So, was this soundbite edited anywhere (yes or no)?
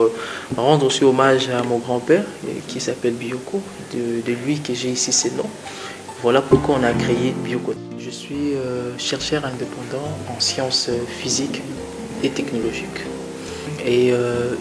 yes